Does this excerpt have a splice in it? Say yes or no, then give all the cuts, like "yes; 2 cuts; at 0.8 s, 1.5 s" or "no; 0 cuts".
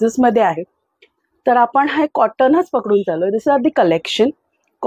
no; 0 cuts